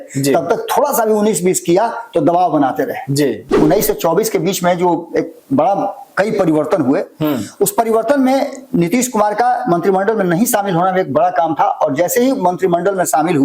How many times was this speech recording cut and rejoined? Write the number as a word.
one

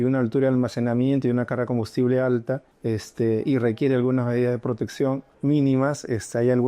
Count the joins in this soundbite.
two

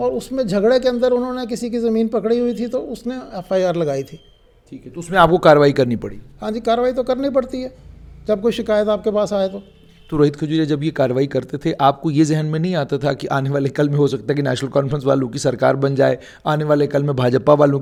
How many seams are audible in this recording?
zero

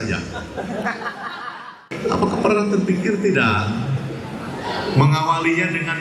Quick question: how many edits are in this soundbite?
one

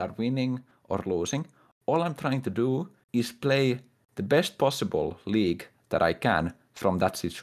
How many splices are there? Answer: zero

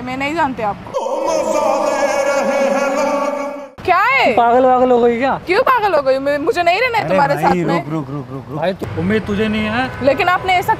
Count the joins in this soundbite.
two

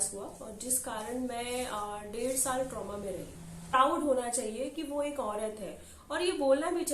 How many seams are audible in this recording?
one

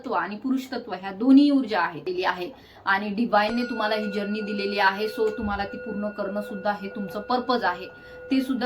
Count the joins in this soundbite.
one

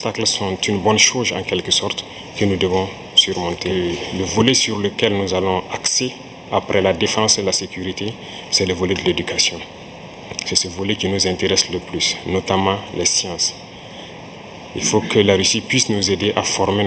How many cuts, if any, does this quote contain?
one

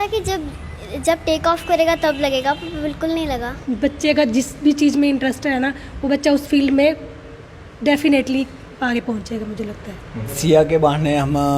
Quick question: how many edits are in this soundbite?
two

